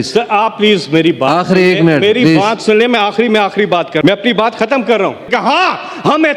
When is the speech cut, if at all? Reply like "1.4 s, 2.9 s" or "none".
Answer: 5.3 s